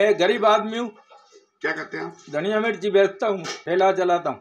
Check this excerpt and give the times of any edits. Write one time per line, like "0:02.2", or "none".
0:03.5